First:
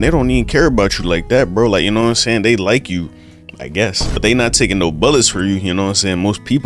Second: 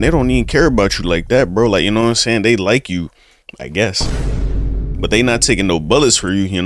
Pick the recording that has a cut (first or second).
first